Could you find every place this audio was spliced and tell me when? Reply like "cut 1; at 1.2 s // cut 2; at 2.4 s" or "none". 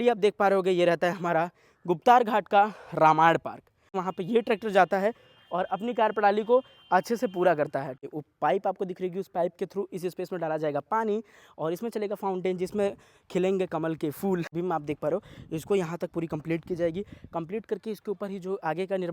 cut 1; at 4.0 s // cut 2; at 8.0 s // cut 3; at 14.5 s